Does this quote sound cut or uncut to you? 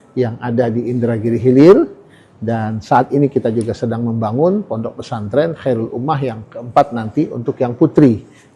uncut